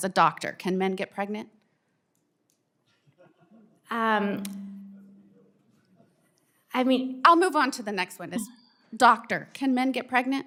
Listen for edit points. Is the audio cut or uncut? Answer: uncut